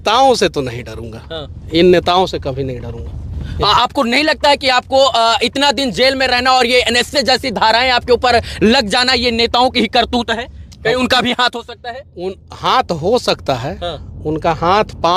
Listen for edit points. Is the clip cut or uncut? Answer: uncut